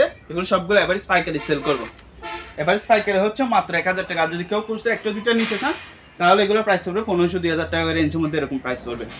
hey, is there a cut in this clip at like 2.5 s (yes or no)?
no